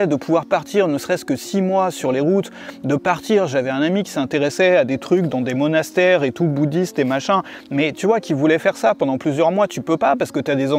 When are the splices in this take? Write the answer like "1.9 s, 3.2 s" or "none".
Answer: none